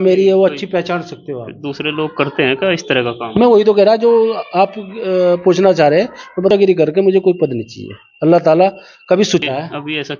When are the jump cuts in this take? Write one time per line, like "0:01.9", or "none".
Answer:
0:06.5
0:09.4